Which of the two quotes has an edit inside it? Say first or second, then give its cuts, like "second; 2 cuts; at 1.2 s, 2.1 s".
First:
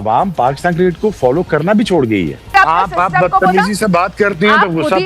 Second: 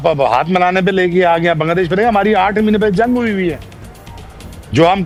first; 1 cut; at 2.5 s